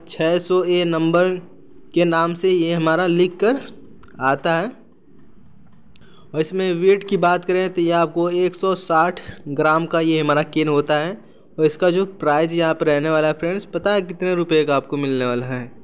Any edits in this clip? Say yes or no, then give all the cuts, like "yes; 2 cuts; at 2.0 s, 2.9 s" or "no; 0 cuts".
no; 0 cuts